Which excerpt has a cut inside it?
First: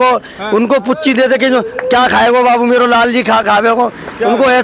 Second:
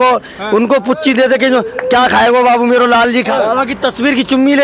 second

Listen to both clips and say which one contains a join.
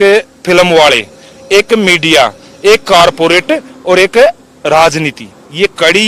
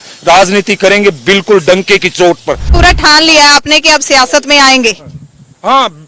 second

